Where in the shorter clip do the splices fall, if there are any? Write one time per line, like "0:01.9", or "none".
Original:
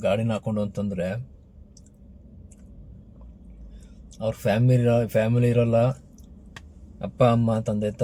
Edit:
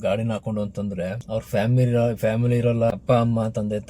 0:01.2
0:02.9